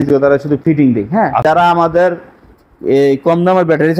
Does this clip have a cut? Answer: yes; 1 cut; at 1.4 s

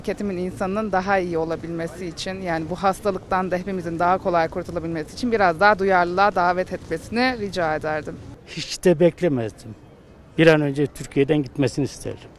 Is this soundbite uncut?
yes; 0 cuts

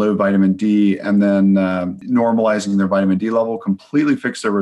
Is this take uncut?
no; 1 cut; at 1.9 s

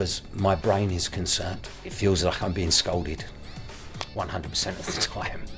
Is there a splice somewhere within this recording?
no; 0 cuts

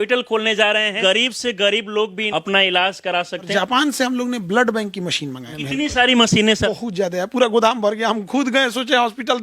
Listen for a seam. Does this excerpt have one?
yes; 5 cuts; at 1.0 s, 2.2 s, 3.5 s, 5.5 s, 6.7 s

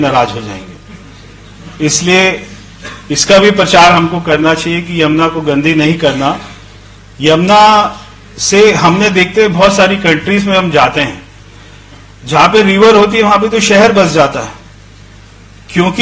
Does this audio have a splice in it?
no; 0 cuts

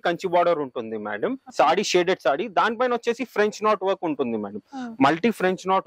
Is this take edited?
yes; 1 cut; at 1.4 s

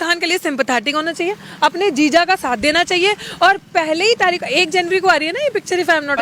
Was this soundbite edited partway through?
no; 0 cuts

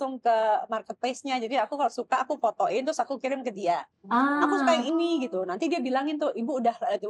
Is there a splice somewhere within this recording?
no; 0 cuts

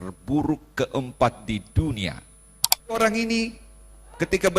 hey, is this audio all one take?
no; 1 cut; at 3.0 s

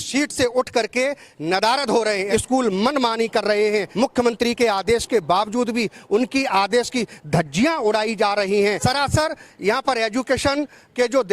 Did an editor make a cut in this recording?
yes; 3 cuts; at 2.2 s, 3.9 s, 8.8 s

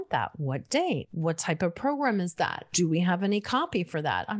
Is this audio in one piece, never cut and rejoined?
no; 2 cuts; at 1.1 s, 2.7 s

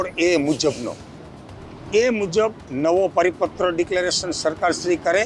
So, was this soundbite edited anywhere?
no; 0 cuts

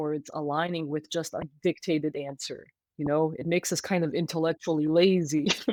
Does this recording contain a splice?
no; 0 cuts

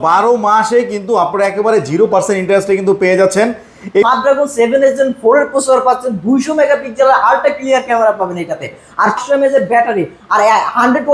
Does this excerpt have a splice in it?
yes; 2 cuts; at 4.0 s, 9.2 s

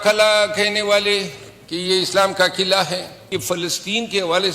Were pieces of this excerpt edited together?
yes; 1 cut; at 3.3 s

